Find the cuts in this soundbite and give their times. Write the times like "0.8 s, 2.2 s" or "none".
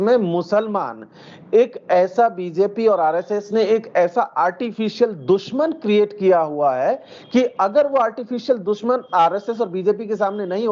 none